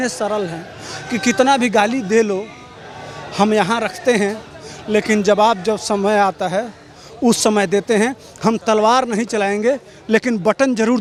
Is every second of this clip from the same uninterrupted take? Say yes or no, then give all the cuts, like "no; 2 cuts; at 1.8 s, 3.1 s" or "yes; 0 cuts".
yes; 0 cuts